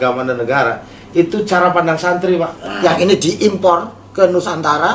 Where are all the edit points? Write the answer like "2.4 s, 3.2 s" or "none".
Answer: 2.6 s